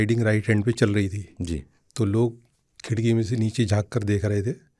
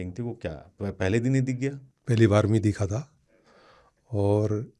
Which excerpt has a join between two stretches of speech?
second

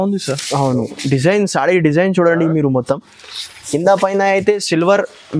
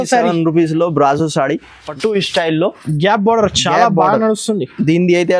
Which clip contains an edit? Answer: second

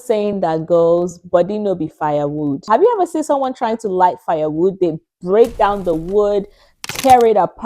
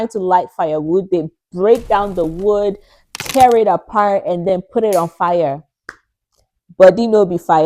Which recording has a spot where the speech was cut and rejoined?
first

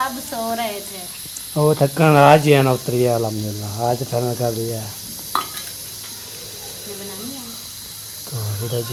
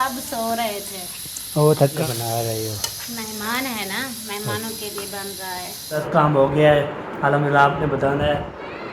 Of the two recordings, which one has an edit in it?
second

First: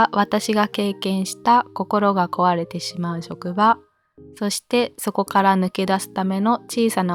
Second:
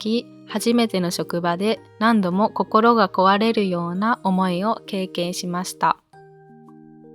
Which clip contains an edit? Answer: second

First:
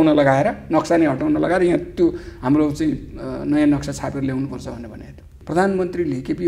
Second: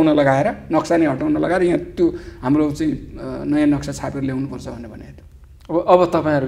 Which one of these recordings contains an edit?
first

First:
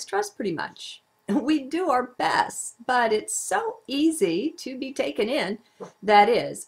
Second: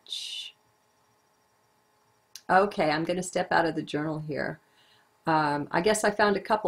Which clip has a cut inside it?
second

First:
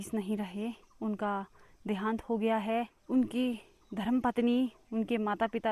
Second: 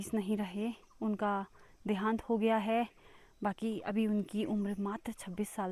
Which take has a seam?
first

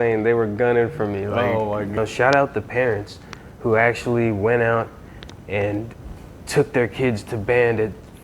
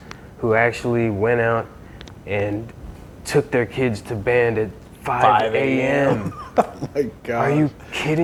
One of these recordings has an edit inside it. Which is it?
first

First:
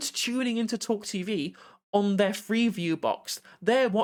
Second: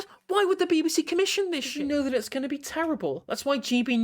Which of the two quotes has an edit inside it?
second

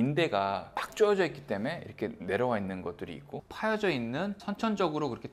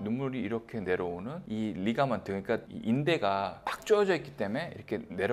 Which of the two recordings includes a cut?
first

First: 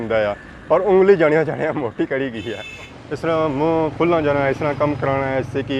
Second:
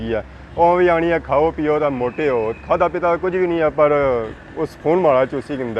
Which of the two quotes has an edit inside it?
first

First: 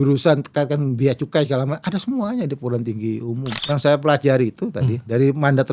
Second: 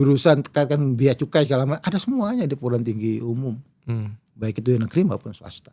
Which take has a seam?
first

